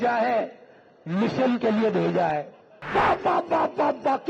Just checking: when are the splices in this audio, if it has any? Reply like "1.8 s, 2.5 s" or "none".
2.8 s